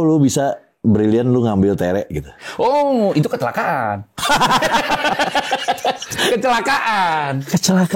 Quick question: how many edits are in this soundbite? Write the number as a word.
zero